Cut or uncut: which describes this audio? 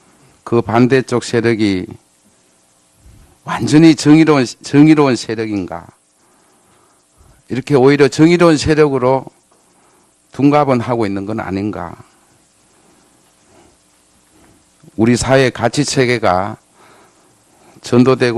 cut